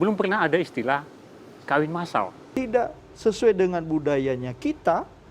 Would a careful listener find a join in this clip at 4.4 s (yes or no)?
no